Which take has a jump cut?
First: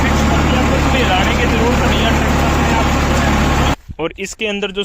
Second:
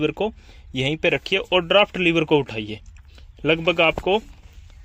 first; 1 cut; at 3.7 s

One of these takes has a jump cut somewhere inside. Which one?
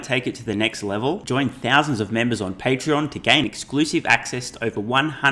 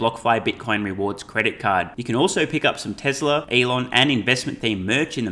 second; 1 cut; at 3.5 s

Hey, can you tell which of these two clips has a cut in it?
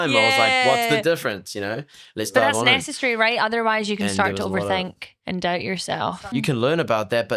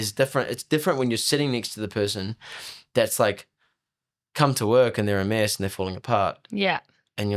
first; 2 cuts; at 2.8 s, 6.3 s

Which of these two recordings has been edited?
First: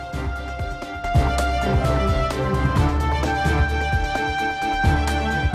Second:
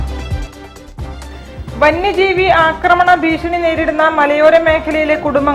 second; 1 cut; at 1.2 s

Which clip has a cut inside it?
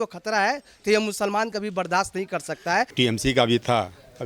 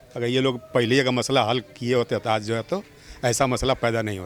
first; 1 cut; at 2.9 s

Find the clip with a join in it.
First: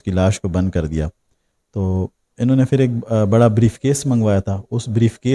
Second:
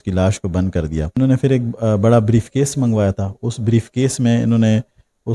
second; 1 cut; at 1.2 s

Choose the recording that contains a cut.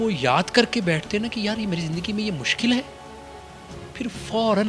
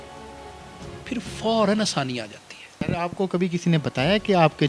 second; 1 cut; at 2.8 s

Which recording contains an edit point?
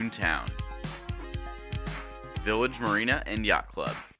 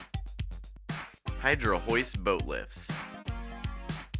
second; 1 cut; at 1.0 s

